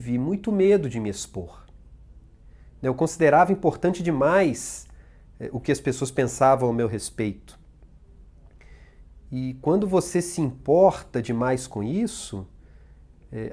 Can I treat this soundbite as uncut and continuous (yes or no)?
yes